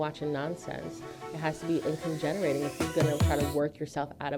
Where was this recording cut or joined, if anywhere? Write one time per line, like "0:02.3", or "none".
none